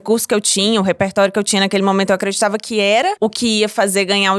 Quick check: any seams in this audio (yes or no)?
yes